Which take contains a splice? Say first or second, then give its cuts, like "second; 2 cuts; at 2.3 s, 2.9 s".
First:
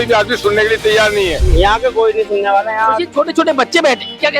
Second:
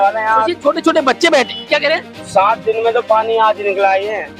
first; 1 cut; at 1.4 s